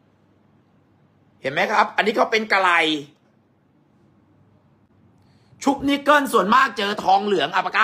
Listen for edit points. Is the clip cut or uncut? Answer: cut